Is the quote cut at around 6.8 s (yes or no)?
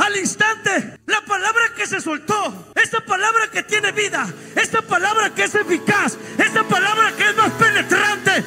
no